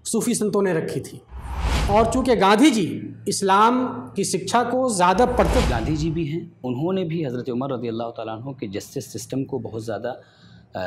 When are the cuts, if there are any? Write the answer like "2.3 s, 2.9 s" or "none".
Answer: 1.7 s, 5.6 s